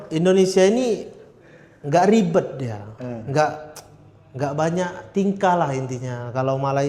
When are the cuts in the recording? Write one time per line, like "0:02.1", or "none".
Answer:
none